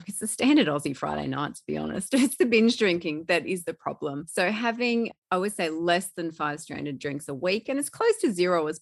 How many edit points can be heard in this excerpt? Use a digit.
1